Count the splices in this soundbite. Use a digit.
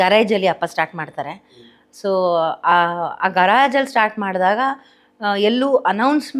0